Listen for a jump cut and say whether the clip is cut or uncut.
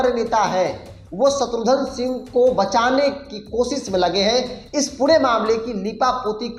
uncut